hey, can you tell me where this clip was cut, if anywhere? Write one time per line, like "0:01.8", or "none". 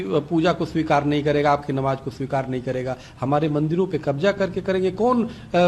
none

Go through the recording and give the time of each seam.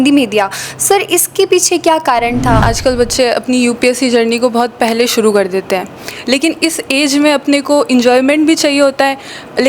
0:02.6

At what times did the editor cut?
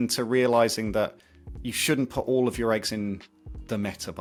none

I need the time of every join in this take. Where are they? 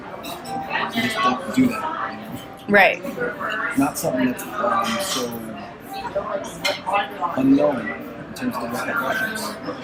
none

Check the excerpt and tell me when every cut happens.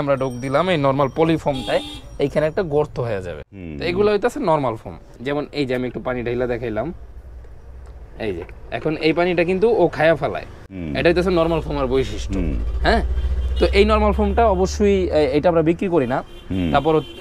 0:05.1

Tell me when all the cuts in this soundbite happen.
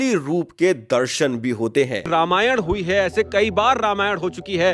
0:02.1

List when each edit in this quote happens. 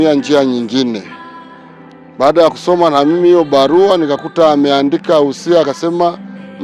none

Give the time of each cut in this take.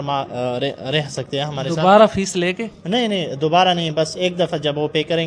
none

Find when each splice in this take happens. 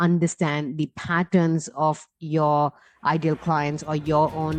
none

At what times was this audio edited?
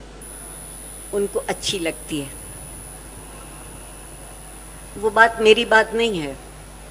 none

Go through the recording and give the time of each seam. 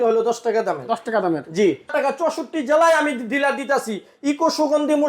0:01.9

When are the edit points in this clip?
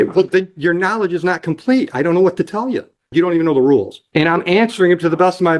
0:03.1
0:04.0

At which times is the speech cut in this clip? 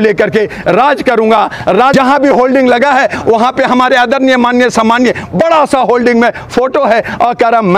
0:01.9

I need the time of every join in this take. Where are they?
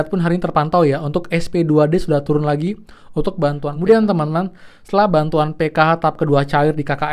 0:03.7

